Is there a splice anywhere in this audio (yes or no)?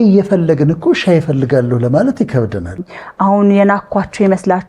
yes